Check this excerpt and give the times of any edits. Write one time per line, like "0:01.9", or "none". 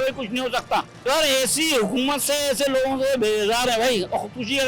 0:00.9

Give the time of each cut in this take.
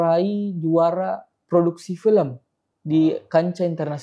none

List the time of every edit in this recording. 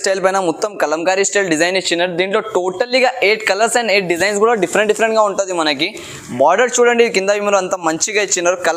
none

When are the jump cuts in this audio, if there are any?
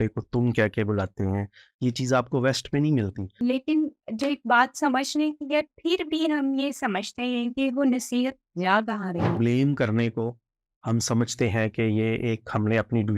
0:03.3
0:09.3

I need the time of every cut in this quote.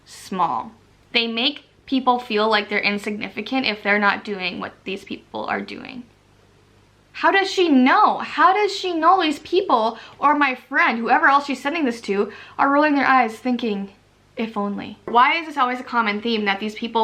0:06.0
0:15.1

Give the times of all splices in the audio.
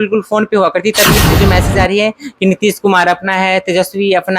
0:01.2

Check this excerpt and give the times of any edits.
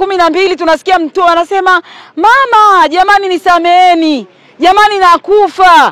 none

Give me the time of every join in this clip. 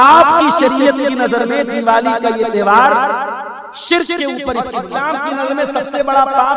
0:04.7

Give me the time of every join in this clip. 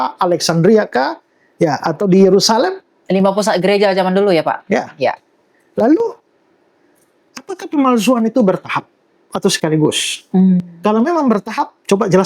none

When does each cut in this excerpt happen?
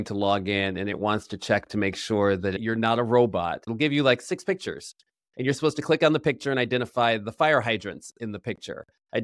0:02.6
0:03.7
0:05.2

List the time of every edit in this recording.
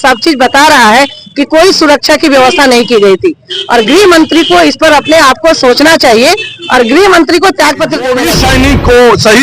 0:08.2

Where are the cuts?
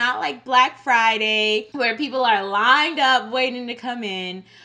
0:01.7

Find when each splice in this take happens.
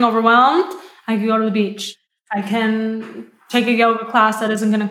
0:01.9

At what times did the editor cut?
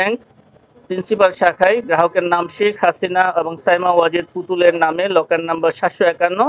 none

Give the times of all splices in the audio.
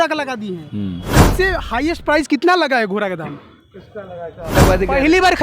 0:01.3
0:04.5

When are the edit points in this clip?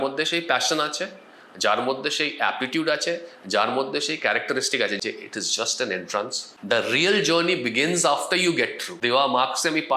0:05.0
0:06.5
0:09.0

